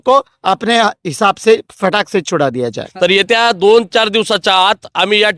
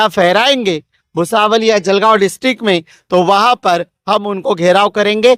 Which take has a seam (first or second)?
first